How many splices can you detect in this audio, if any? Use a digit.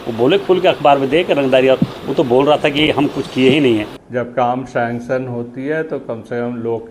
1